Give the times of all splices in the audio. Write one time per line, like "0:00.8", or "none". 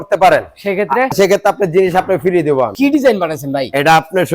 0:01.1
0:02.7